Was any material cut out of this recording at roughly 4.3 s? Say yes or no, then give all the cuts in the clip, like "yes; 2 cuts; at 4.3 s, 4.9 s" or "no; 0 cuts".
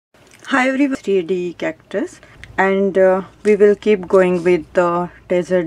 no; 1 cut; at 0.9 s